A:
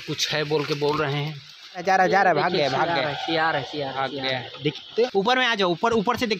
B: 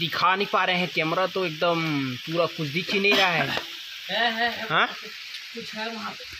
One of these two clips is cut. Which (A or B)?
A